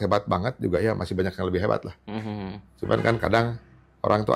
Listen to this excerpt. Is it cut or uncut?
uncut